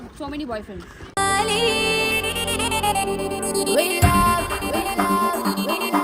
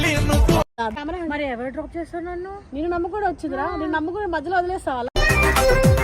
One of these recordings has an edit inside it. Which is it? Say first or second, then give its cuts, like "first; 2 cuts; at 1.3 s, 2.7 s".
second; 1 cut; at 1.0 s